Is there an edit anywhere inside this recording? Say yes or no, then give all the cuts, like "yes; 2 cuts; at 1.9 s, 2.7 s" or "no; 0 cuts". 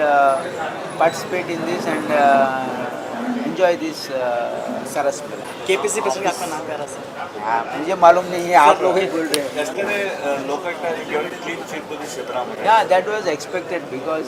no; 0 cuts